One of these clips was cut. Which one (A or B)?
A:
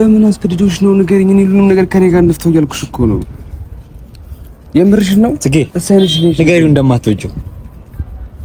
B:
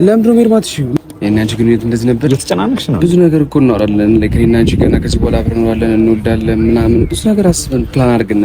B